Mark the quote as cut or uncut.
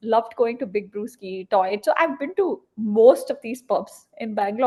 uncut